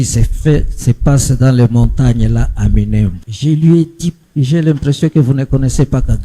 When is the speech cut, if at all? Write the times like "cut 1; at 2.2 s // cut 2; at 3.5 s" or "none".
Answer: cut 1; at 3.3 s // cut 2; at 4.2 s